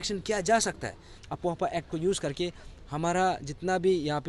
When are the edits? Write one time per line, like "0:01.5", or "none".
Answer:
0:01.1